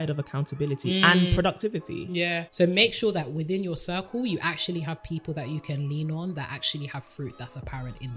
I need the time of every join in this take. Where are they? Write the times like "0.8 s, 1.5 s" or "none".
2.4 s